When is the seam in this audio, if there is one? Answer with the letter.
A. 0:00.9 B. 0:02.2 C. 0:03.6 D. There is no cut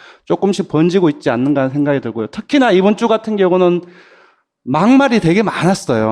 B